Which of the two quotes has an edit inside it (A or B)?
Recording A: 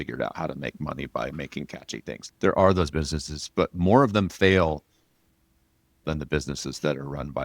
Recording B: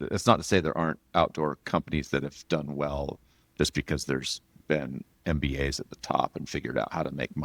A